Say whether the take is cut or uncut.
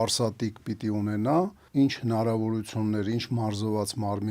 cut